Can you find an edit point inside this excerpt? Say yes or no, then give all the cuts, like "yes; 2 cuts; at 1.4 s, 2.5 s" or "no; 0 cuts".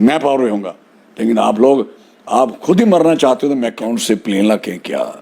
yes; 1 cut; at 3.9 s